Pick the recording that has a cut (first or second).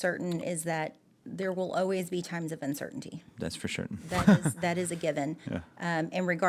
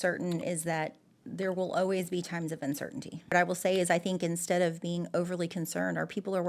second